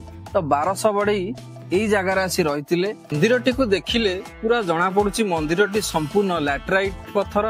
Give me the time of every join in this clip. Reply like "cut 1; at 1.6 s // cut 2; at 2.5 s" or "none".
cut 1; at 3.1 s